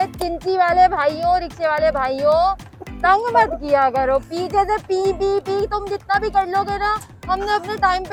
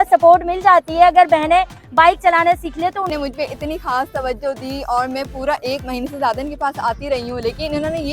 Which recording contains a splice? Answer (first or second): second